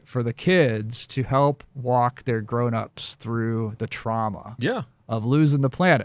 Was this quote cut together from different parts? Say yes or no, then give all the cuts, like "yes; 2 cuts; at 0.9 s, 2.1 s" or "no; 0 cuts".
no; 0 cuts